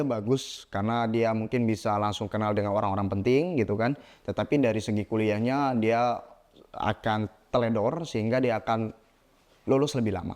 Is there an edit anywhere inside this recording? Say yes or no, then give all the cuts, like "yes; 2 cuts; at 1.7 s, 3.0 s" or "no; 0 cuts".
no; 0 cuts